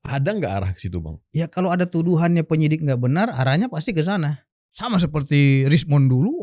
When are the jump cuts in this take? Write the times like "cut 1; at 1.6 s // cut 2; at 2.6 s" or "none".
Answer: cut 1; at 4.5 s